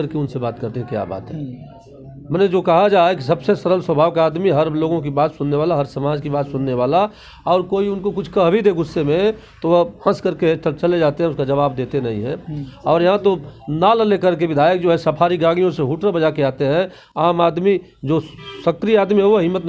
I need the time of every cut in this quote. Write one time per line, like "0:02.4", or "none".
none